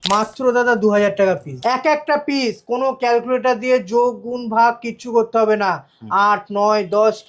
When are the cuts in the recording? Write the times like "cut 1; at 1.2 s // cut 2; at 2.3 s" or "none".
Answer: cut 1; at 1.5 s